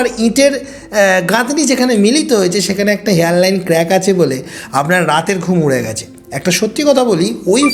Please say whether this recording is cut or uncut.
uncut